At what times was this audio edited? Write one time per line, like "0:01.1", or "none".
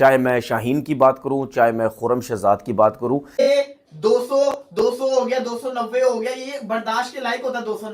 0:03.5